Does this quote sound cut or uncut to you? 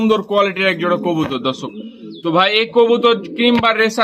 uncut